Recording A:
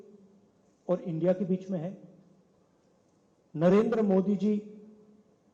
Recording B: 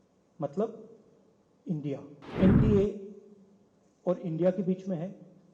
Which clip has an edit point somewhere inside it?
B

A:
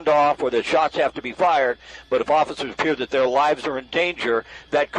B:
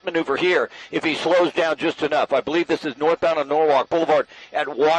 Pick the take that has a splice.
B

